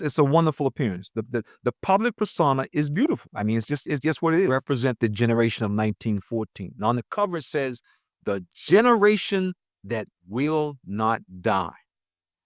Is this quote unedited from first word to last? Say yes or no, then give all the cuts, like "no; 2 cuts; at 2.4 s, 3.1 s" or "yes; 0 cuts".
no; 1 cut; at 4.5 s